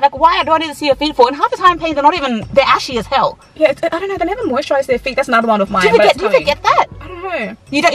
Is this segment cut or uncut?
uncut